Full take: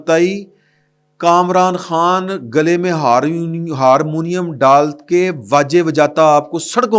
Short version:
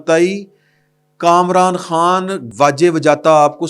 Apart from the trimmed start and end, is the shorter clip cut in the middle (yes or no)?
yes